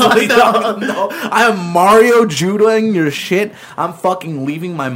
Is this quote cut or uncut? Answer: uncut